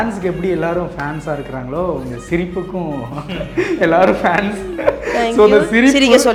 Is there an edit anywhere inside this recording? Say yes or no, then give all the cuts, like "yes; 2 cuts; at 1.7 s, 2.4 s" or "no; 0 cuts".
no; 0 cuts